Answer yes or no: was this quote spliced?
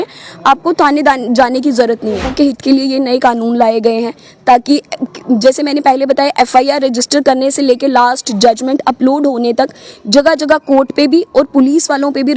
yes